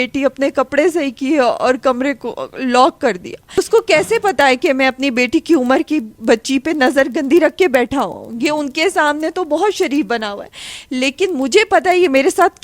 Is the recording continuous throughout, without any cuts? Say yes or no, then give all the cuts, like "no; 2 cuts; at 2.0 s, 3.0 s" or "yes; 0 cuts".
no; 1 cut; at 3.6 s